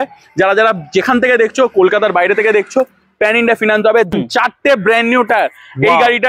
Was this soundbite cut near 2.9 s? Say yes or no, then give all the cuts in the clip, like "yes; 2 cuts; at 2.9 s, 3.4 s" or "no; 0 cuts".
no; 1 cut; at 4.1 s